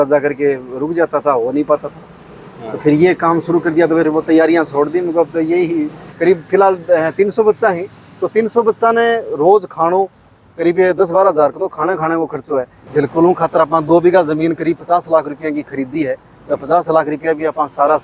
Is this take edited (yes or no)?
yes